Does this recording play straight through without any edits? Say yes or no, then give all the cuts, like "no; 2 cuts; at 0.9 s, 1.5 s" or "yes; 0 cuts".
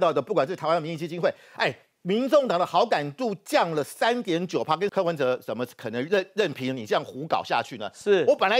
no; 1 cut; at 4.9 s